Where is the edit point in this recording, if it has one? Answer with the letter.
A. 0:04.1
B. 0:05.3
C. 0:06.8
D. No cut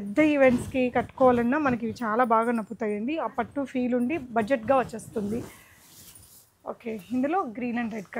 D